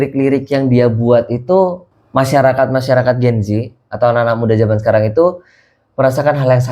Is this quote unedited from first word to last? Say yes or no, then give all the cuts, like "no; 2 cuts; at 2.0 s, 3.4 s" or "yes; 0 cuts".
yes; 0 cuts